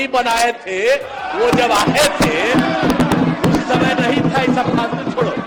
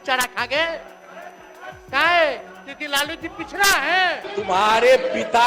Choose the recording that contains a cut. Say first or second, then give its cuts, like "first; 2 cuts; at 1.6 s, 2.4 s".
second; 1 cut; at 4.3 s